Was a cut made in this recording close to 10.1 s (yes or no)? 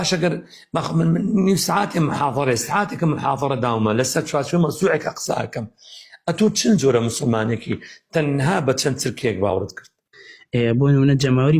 yes